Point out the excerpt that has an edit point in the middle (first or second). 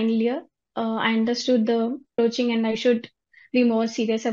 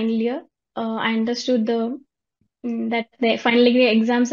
first